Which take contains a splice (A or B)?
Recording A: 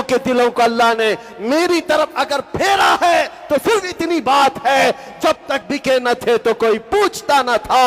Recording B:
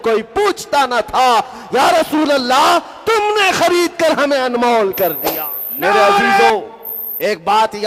B